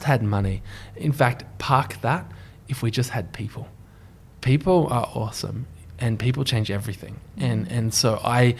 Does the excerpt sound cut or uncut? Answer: uncut